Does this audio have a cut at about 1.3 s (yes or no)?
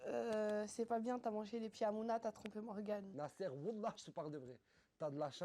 no